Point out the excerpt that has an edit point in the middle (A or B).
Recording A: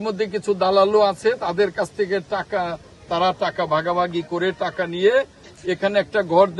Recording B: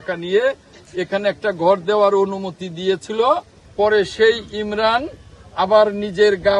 B